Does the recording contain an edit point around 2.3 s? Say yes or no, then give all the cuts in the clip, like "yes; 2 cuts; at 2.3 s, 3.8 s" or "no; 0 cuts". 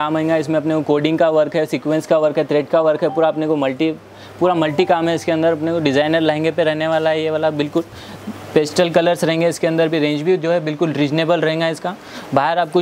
no; 0 cuts